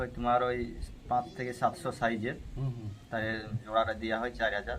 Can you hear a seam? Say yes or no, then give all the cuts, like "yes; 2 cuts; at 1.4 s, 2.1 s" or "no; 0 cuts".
no; 0 cuts